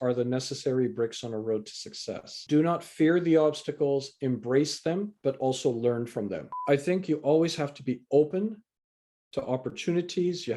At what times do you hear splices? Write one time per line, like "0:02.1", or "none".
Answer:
0:02.3
0:05.1
0:06.5